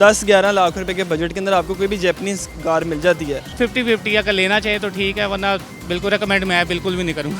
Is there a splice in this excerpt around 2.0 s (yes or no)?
no